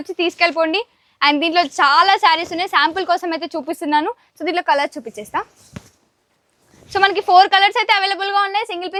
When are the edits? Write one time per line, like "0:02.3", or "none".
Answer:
none